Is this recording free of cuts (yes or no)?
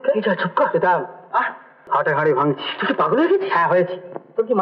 no